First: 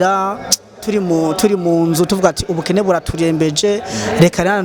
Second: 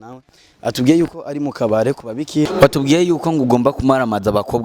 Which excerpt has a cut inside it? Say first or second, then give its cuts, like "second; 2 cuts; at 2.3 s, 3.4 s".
second; 1 cut; at 2.5 s